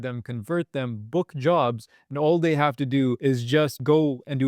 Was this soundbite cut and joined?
yes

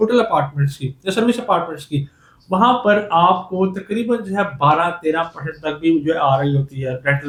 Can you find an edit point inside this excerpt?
no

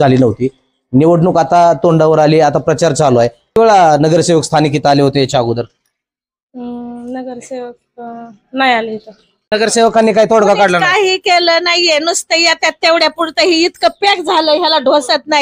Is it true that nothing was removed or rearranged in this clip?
no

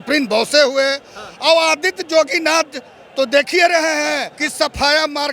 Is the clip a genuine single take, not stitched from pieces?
no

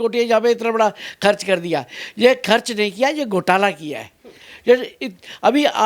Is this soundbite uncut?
yes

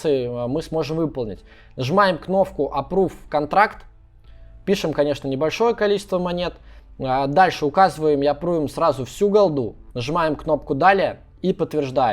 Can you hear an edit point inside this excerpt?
no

